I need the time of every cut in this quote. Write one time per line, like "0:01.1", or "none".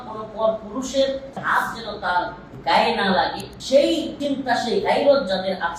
0:01.4